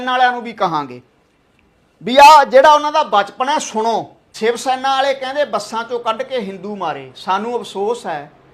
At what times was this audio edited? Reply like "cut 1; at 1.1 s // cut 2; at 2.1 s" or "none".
cut 1; at 4.2 s

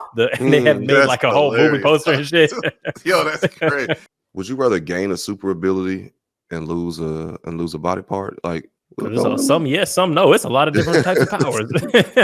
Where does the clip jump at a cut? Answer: cut 1; at 4.1 s // cut 2; at 8.8 s

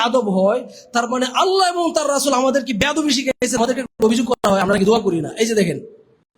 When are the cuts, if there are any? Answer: cut 1; at 3.6 s

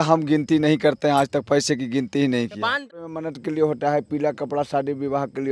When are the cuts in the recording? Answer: cut 1; at 2.8 s

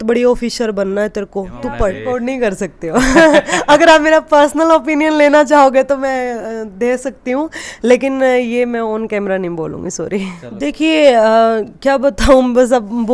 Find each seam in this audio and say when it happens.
cut 1; at 2.0 s // cut 2; at 10.4 s

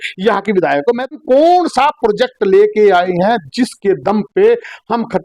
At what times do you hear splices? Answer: cut 1; at 1.2 s

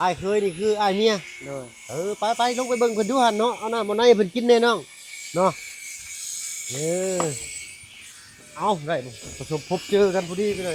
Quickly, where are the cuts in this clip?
none

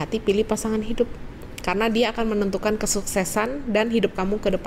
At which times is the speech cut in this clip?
none

